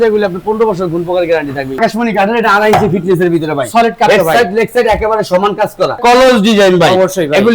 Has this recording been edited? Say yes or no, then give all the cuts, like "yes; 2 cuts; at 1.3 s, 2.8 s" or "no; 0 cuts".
yes; 2 cuts; at 1.8 s, 6.0 s